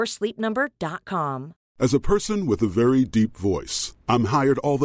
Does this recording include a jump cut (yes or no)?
yes